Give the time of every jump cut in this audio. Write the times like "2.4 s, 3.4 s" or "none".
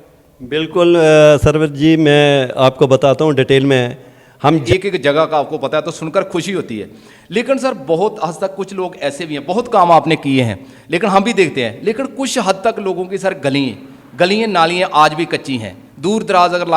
4.6 s